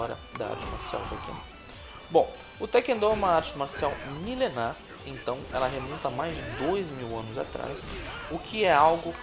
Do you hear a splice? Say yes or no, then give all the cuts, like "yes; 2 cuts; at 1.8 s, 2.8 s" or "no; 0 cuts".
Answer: yes; 1 cut; at 2.0 s